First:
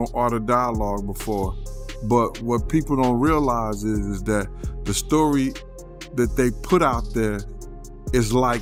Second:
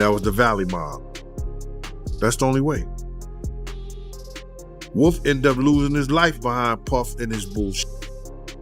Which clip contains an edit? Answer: second; 3 cuts; at 2.8 s, 4.6 s, 7.8 s

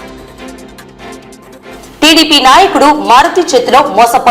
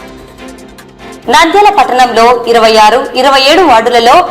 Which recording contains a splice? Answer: first; 1 cut; at 1.2 s

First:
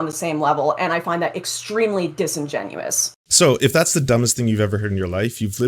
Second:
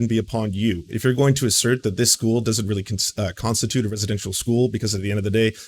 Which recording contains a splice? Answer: first; 1 cut; at 3.2 s

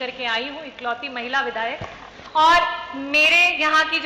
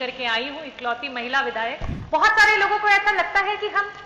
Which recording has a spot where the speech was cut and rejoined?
second; 1 cut; at 1.9 s

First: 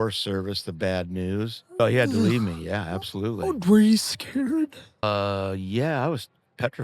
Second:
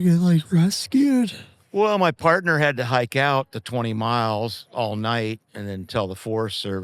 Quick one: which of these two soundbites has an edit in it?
first; 2 cuts; at 1.8 s, 5.0 s

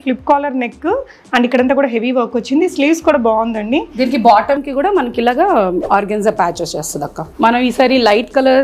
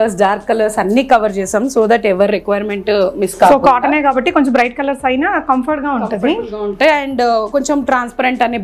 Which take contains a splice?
first; 2 cuts; at 5.8 s, 7.3 s

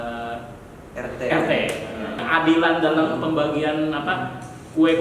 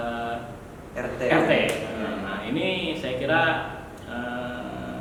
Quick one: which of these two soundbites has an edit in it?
first; 1 cut; at 2.2 s

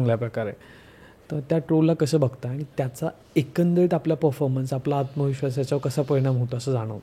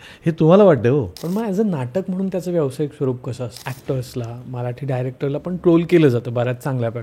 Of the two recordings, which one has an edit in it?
second; 2 cuts; at 1.2 s, 3.7 s

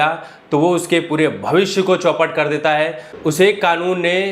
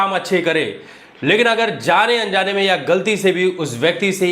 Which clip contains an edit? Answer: first; 1 cut; at 3.1 s

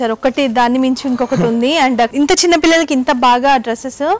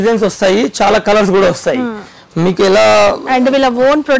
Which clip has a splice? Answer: first; 1 cut; at 2.1 s

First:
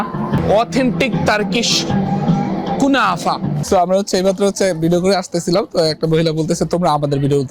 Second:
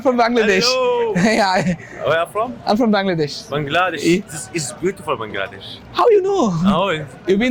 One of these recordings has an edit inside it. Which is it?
first; 1 cut; at 3.6 s

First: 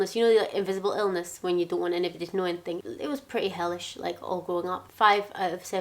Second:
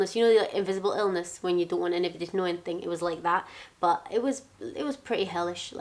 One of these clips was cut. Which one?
first; 2 cuts; at 2.8 s, 4.8 s

